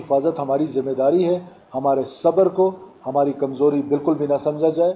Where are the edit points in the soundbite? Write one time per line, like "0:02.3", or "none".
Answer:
none